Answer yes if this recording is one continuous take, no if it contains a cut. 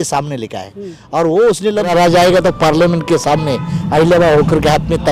no